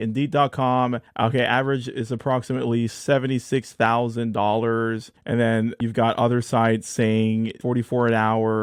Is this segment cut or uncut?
uncut